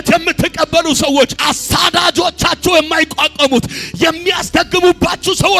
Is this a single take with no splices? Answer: no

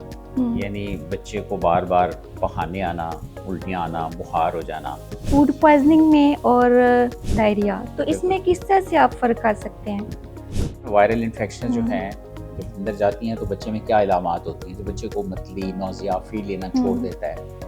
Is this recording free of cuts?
no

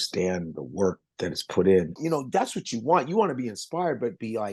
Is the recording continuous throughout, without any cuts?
no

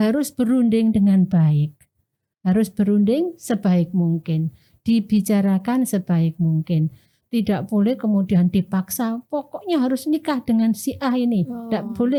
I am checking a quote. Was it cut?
no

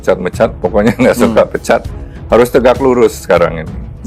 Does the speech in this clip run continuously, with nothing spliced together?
yes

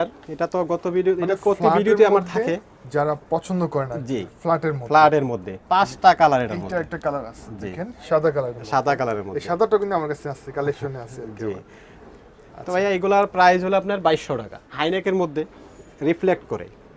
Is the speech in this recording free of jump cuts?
yes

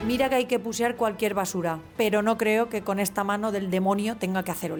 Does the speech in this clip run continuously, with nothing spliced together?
yes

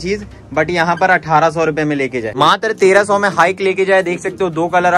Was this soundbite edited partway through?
yes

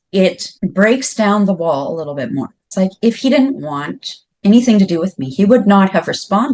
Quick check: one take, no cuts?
yes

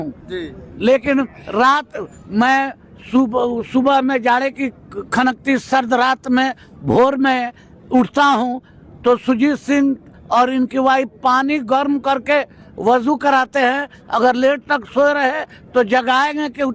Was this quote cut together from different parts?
no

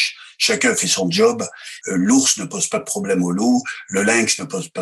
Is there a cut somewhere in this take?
yes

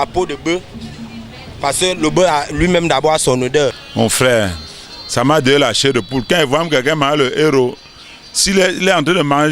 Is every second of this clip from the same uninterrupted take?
no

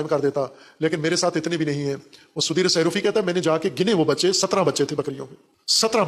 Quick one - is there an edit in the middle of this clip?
no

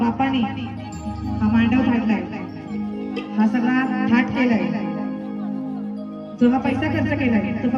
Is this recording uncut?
yes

